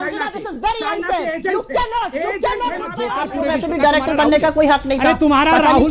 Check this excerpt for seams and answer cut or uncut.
cut